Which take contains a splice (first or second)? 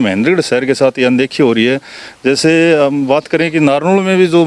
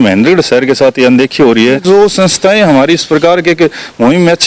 second